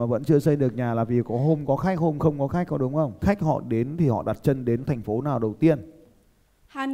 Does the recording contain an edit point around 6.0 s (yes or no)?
yes